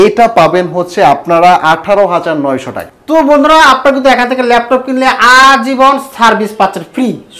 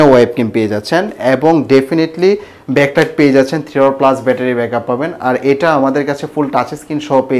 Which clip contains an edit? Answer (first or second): first